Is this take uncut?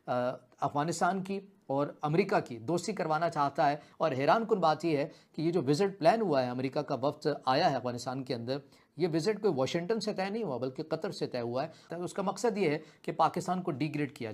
no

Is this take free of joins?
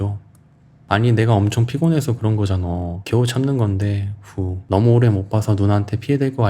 no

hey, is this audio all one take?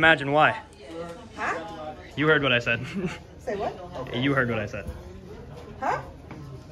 yes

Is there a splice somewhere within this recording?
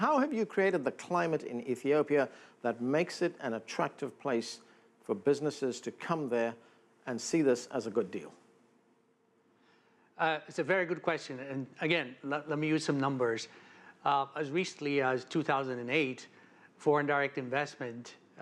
no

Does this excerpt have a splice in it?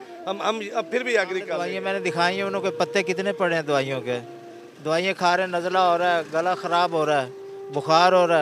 yes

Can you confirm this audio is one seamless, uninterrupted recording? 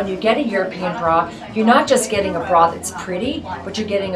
yes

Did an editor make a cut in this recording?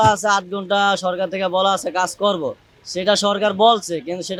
no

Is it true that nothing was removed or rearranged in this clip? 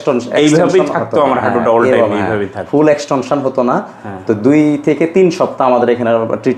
yes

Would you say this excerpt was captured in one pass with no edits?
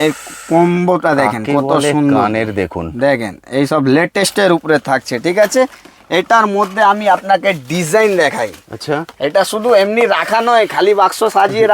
yes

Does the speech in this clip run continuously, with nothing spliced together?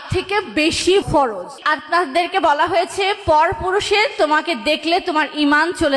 no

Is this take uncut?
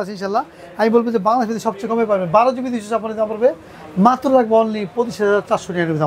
yes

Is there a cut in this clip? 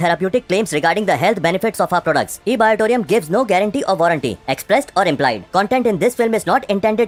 no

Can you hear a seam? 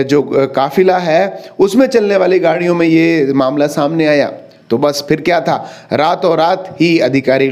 no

